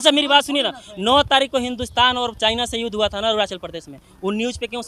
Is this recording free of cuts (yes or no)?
yes